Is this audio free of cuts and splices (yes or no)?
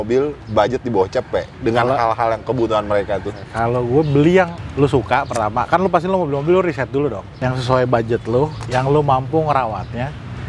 no